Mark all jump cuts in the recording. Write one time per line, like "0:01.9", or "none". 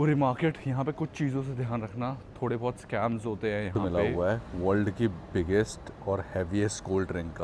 0:03.7